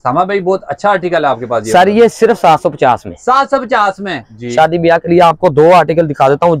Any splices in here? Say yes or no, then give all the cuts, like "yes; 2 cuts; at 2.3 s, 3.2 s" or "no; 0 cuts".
yes; 1 cut; at 4.3 s